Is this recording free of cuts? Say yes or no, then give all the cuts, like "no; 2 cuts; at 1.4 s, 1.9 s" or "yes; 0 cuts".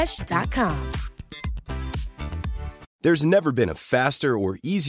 no; 1 cut; at 2.8 s